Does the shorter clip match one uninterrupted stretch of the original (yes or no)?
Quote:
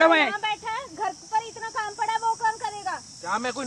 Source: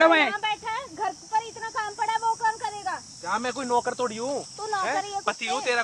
yes